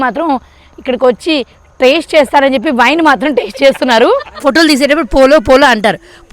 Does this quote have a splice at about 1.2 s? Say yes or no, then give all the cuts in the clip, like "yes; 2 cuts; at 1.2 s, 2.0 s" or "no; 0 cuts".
no; 1 cut; at 4.4 s